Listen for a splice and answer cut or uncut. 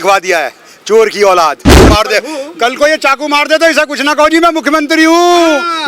cut